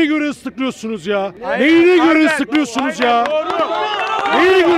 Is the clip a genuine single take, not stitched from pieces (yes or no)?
no